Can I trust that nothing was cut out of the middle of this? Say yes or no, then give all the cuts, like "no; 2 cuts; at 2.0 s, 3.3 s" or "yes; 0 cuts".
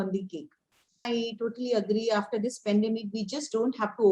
no; 1 cut; at 1.1 s